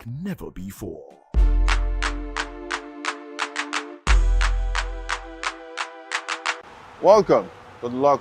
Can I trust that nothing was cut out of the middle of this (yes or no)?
no